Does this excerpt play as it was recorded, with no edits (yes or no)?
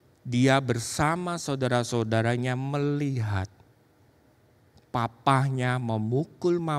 yes